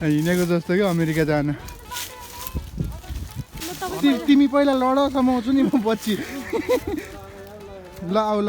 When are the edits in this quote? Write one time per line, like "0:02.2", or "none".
0:03.5